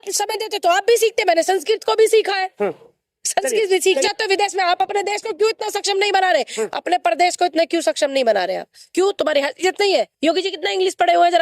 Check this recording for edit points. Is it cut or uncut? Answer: cut